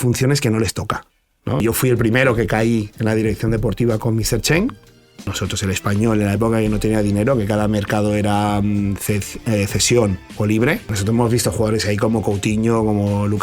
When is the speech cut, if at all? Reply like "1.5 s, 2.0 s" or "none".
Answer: 1.6 s, 5.3 s, 10.9 s